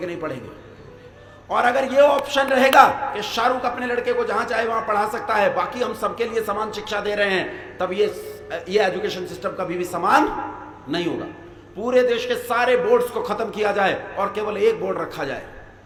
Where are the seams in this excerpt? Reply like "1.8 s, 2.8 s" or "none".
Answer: none